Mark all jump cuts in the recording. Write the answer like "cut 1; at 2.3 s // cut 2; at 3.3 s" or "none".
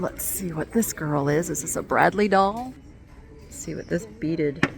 cut 1; at 2.8 s